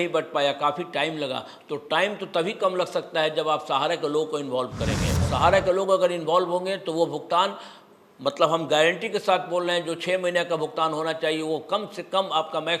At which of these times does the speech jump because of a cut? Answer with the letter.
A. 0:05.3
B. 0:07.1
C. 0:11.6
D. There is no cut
A